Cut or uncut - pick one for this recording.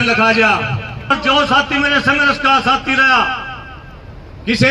cut